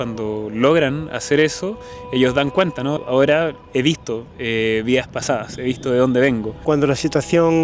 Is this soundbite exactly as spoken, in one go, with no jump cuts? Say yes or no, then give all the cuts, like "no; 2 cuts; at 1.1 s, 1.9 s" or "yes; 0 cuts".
no; 2 cuts; at 3.0 s, 6.6 s